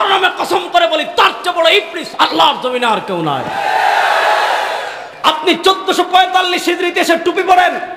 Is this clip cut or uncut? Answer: cut